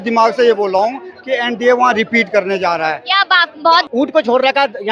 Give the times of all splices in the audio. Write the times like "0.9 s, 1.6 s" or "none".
3.9 s